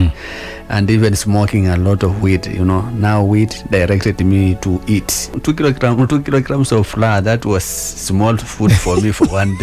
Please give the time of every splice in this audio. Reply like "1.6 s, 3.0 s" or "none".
5.3 s